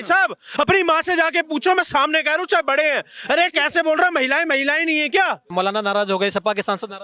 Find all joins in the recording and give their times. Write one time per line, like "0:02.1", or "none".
0:05.5